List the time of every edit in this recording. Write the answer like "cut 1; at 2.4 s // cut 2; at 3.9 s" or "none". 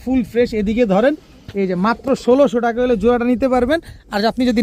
none